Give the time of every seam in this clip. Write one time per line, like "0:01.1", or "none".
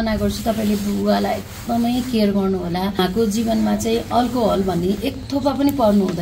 0:03.0